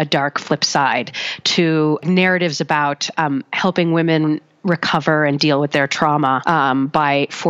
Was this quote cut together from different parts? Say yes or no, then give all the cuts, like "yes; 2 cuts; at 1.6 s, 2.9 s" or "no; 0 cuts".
yes; 1 cut; at 2.0 s